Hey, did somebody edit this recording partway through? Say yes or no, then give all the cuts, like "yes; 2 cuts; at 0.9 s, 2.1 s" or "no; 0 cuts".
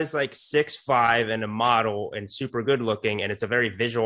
no; 0 cuts